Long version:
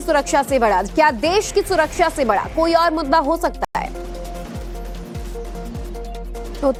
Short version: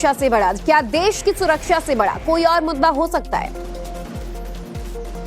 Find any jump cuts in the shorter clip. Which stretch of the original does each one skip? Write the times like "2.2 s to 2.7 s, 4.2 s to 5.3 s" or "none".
3.6 s to 3.7 s